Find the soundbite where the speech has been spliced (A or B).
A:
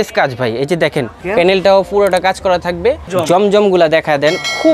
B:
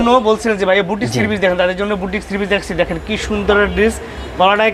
A